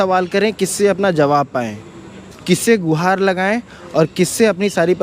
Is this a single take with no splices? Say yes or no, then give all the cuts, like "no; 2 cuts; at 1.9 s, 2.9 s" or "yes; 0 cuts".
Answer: yes; 0 cuts